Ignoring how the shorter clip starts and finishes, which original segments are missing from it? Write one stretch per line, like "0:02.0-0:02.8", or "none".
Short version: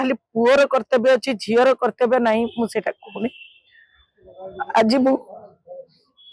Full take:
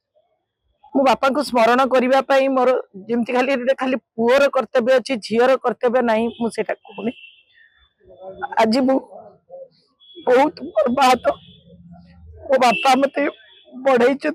none